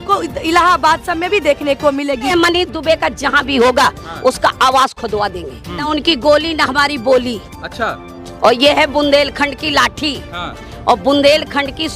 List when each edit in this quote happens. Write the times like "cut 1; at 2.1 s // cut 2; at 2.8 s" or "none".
cut 1; at 2.3 s // cut 2; at 5.9 s